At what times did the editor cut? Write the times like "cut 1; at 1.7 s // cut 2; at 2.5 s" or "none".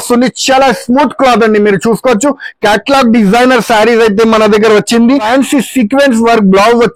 cut 1; at 5.3 s